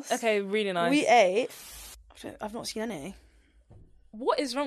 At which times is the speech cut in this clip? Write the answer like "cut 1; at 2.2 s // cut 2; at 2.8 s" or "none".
cut 1; at 1.6 s